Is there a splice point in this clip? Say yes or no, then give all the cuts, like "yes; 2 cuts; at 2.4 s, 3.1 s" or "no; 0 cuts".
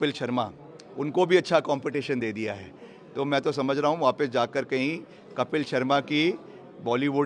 no; 0 cuts